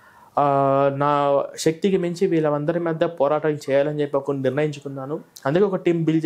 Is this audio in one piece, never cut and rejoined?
yes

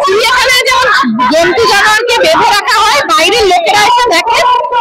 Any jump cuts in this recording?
no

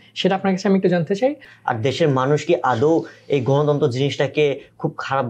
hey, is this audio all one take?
no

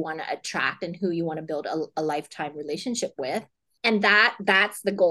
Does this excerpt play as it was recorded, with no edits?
no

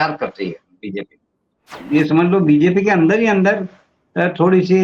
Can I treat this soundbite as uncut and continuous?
no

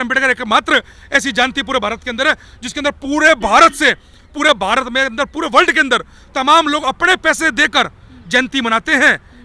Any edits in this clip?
no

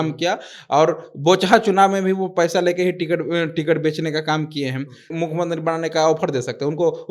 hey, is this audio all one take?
no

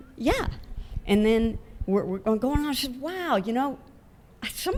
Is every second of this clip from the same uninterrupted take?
yes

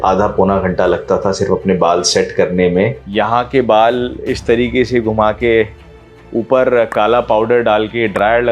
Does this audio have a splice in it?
yes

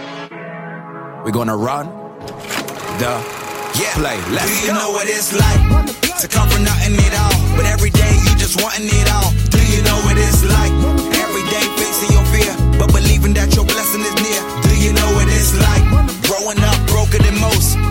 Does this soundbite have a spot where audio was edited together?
no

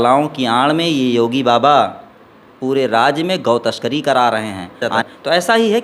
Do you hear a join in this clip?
yes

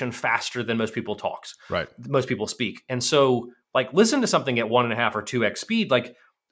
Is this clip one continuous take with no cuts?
yes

